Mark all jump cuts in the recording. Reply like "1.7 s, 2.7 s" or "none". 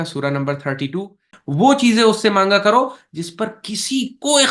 1.4 s